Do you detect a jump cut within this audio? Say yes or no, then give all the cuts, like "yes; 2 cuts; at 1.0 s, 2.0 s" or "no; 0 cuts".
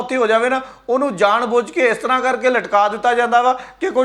no; 0 cuts